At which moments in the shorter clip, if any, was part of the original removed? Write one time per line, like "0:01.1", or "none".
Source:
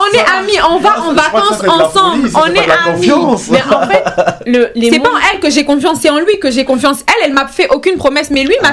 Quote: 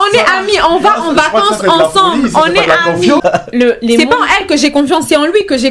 0:03.2